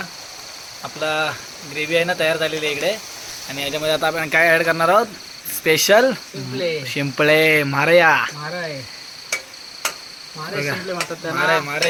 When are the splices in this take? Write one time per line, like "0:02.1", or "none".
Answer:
none